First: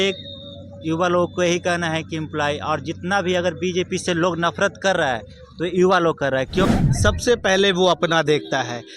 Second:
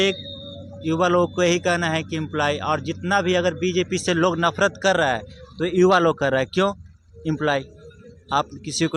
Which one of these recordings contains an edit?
first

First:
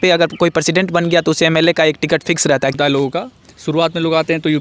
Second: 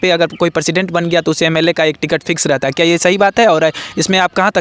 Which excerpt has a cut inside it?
first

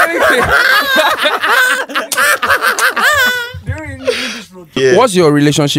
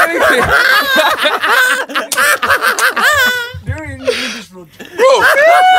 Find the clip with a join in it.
first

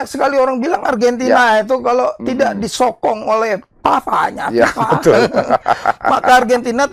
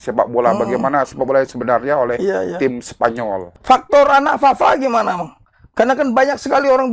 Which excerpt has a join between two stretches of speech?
second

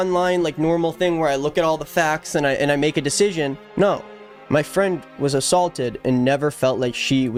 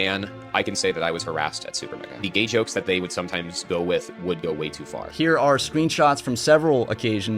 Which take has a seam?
second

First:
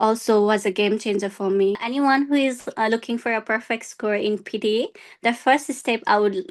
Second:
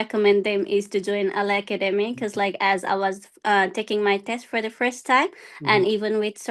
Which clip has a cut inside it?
first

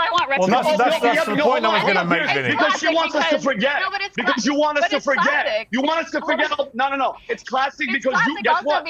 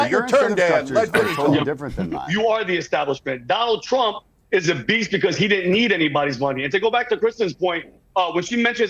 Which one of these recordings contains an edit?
second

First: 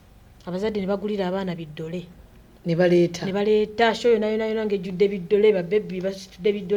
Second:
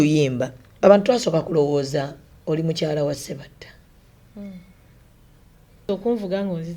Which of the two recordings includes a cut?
second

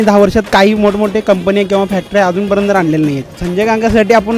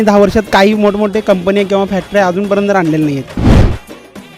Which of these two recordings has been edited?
first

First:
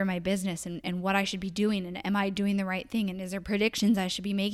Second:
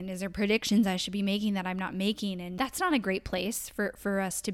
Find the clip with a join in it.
second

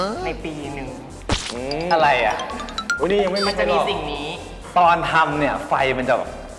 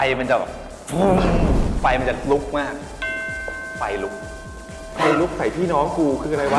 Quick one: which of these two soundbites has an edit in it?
first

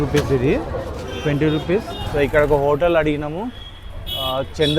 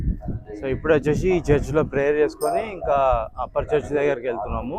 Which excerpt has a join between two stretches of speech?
first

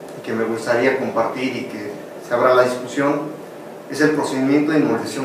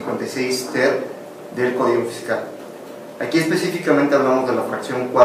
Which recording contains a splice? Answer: first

